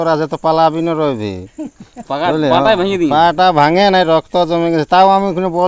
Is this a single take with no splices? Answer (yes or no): yes